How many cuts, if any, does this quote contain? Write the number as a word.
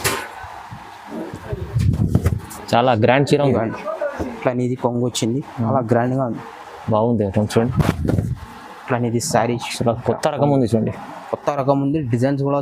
one